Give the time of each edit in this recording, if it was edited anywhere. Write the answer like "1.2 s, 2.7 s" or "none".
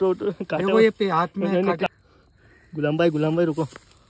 1.9 s